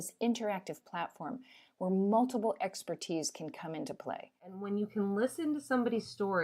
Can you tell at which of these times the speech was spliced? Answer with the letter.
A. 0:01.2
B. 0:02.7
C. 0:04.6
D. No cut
C